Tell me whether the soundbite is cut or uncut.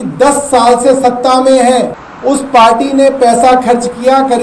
cut